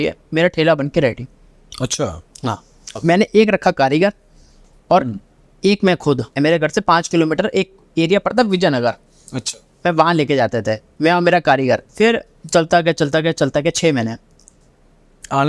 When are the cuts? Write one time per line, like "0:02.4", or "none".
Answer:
none